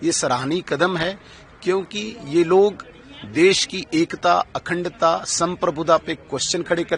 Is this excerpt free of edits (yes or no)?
yes